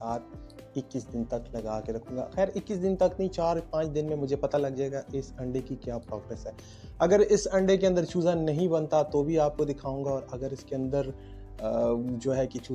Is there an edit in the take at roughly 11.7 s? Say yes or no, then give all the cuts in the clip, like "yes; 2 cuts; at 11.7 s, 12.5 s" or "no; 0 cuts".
no; 0 cuts